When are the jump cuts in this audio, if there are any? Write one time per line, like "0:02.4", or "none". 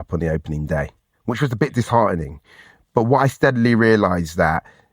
none